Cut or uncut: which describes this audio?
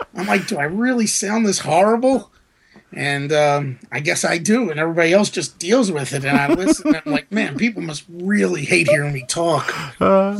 uncut